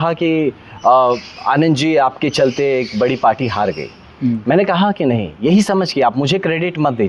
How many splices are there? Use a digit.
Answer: 0